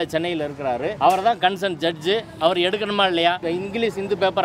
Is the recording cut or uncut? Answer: cut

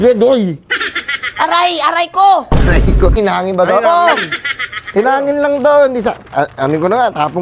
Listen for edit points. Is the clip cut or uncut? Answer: cut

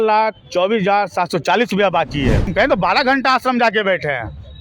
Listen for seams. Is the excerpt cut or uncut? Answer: cut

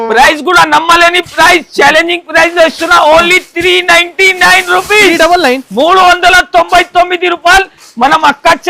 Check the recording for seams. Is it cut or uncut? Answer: uncut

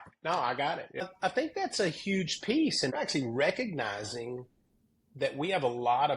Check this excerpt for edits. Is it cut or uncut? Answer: cut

